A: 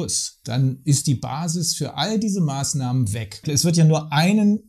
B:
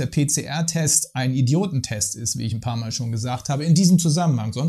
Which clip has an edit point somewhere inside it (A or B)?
A